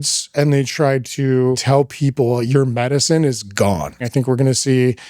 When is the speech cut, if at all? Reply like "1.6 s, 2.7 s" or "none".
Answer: 1.6 s, 3.9 s